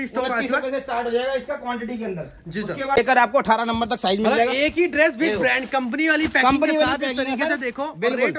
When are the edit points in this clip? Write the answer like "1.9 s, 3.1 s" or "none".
2.9 s